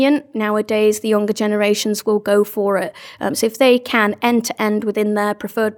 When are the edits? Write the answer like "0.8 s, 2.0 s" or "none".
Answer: none